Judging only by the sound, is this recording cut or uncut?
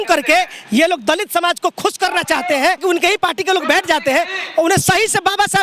cut